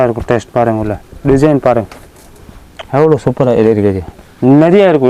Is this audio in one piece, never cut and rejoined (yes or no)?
yes